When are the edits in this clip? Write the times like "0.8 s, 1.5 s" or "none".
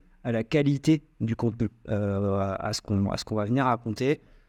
none